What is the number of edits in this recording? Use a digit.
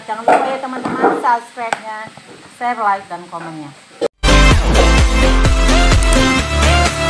1